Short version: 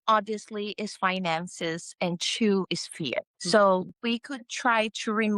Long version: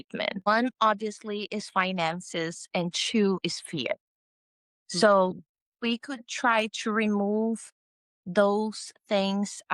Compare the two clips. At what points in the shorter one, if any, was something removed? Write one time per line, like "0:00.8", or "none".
0:03.4
0:03.9